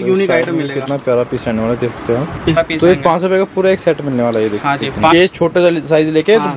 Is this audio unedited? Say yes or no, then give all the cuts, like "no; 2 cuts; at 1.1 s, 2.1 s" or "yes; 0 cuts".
no; 2 cuts; at 2.6 s, 5.1 s